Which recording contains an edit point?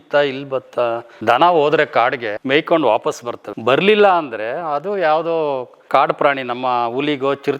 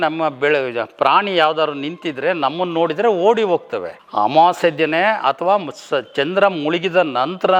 first; 1 cut; at 1.1 s

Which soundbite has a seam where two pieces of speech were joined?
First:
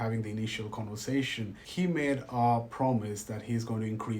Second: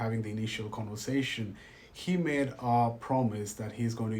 first; 1 cut; at 1.6 s

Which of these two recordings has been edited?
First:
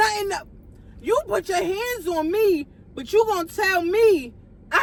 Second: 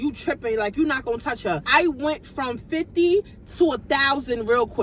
second; 1 cut; at 1.6 s

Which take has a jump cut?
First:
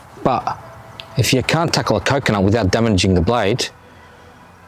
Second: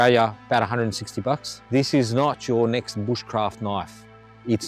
second; 1 cut; at 1.5 s

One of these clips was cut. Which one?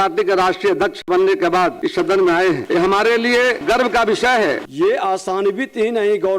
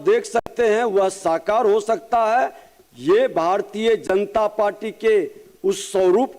first; 4 cuts; at 1.8 s, 2.6 s, 3.6 s, 4.7 s

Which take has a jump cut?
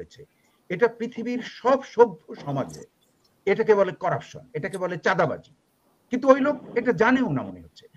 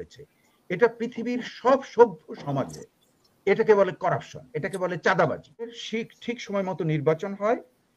second; 1 cut; at 5.8 s

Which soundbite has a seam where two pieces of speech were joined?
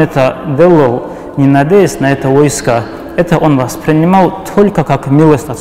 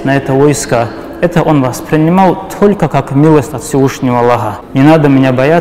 second; 1 cut; at 4.6 s

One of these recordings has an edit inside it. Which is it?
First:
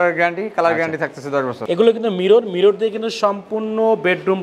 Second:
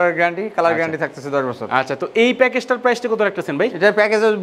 first; 1 cut; at 1.6 s

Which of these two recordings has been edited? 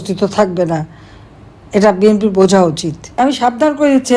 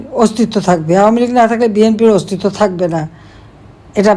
first; 1 cut; at 3.3 s

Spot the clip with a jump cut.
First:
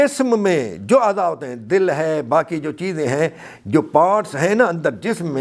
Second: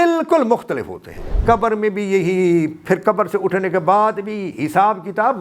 second; 1 cut; at 1.3 s

